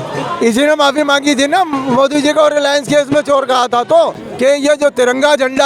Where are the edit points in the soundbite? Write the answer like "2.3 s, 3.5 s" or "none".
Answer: 4.2 s